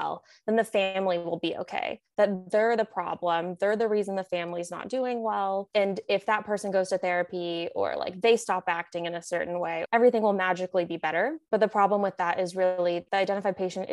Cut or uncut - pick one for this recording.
cut